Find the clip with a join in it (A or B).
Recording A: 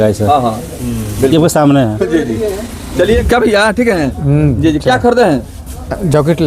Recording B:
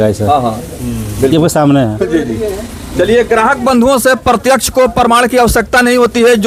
A